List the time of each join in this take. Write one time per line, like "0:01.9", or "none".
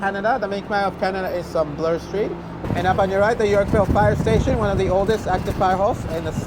0:02.5